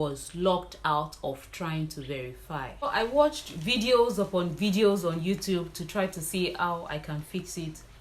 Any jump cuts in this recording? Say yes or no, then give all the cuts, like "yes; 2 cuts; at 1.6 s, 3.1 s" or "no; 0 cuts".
yes; 1 cut; at 2.9 s